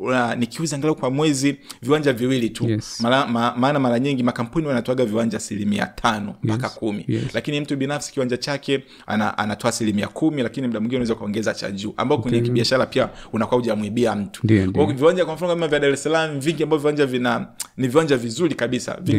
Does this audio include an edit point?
no; 0 cuts

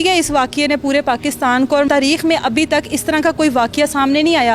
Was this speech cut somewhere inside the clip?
yes; 1 cut; at 1.9 s

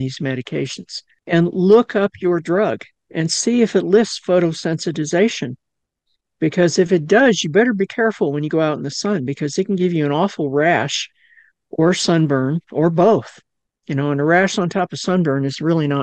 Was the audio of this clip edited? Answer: yes; 1 cut; at 1.2 s

